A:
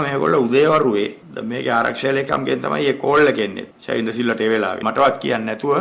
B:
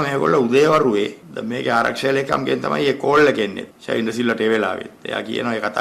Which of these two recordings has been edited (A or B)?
A